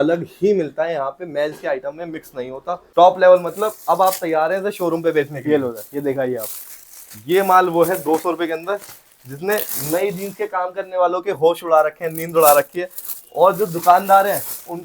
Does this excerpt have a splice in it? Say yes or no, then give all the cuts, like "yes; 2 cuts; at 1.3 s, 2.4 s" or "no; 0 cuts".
yes; 1 cut; at 2.8 s